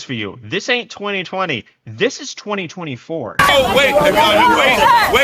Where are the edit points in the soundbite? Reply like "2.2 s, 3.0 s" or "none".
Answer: 3.5 s